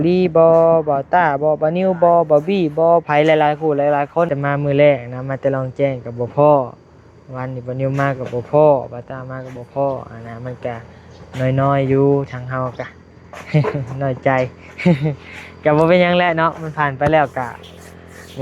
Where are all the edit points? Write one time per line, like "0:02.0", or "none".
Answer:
0:04.3